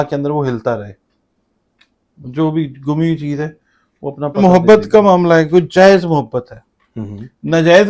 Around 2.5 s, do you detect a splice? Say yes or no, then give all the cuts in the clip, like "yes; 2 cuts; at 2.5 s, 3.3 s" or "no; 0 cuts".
no; 1 cut; at 4.4 s